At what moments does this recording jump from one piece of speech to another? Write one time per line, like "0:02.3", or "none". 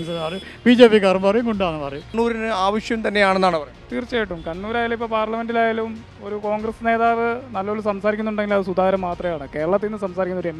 0:02.0